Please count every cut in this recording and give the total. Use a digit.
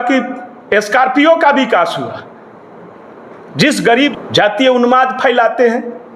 1